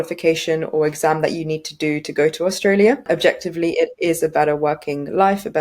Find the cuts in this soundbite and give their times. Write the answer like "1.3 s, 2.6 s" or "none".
3.0 s